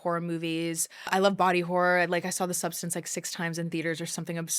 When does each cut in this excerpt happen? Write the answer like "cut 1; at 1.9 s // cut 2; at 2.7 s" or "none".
cut 1; at 1.1 s